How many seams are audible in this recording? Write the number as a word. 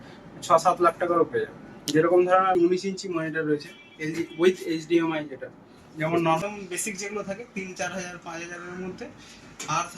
two